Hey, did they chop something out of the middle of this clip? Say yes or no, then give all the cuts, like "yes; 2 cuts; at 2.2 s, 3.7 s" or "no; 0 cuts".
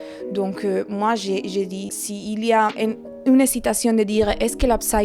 yes; 2 cuts; at 1.9 s, 2.7 s